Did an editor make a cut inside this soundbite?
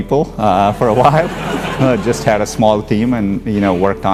no; 0 cuts

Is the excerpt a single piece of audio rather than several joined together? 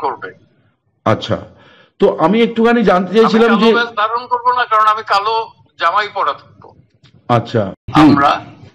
no; 1 cut; at 7.8 s

